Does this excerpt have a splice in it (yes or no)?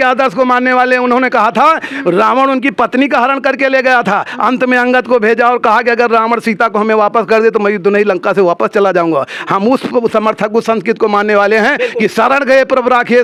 no